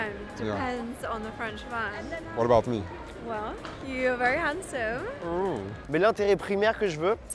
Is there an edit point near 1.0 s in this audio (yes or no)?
no